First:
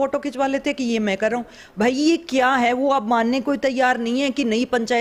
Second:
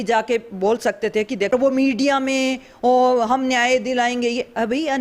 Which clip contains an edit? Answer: second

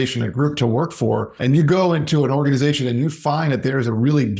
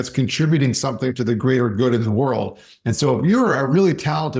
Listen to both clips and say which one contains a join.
first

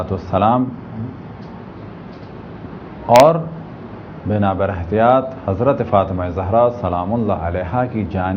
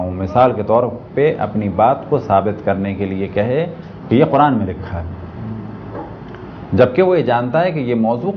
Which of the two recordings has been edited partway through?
first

